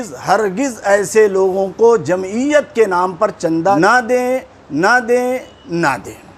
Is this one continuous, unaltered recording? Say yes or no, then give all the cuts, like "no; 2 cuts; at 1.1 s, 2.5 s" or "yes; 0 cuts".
no; 1 cut; at 3.8 s